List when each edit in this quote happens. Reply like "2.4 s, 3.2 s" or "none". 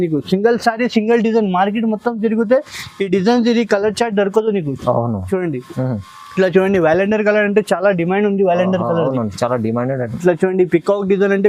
none